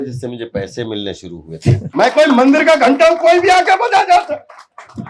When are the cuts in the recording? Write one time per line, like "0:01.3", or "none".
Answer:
0:01.8